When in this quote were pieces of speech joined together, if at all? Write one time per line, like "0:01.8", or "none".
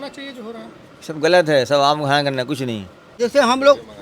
0:03.0